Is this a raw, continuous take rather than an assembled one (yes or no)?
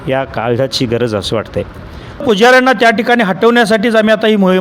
no